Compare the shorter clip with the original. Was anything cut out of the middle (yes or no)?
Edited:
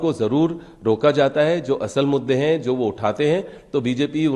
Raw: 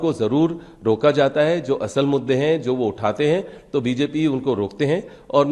no